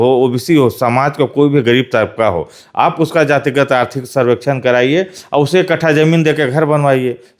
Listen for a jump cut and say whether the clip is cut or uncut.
uncut